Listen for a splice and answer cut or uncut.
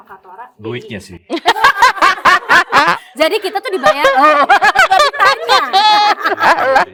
uncut